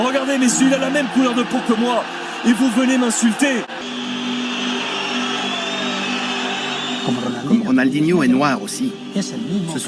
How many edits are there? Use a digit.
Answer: 1